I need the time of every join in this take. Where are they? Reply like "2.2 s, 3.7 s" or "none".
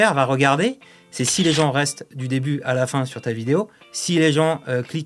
none